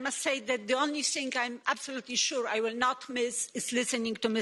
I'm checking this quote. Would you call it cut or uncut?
uncut